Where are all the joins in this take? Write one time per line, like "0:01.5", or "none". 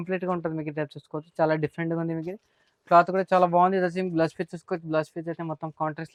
none